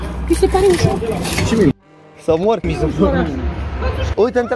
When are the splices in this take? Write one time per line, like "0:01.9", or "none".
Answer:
none